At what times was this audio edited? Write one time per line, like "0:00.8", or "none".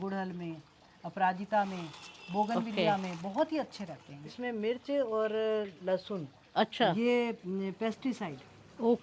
0:04.4